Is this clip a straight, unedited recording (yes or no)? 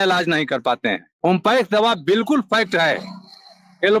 no